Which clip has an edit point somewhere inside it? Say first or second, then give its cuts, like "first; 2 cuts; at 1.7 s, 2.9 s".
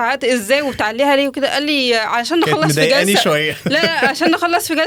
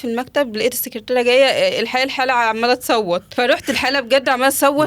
second; 1 cut; at 3.3 s